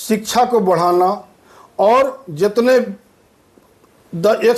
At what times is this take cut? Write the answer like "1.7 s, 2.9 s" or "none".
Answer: none